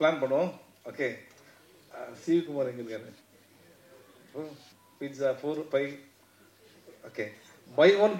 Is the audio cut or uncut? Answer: uncut